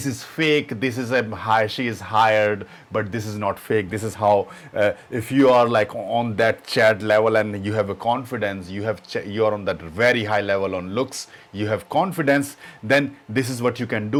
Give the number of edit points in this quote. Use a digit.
0